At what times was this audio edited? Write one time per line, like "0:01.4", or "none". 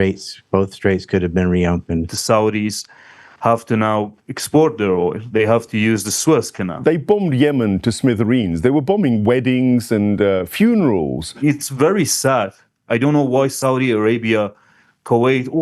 0:02.1
0:06.7
0:11.3